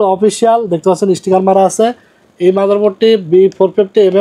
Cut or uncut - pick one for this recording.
uncut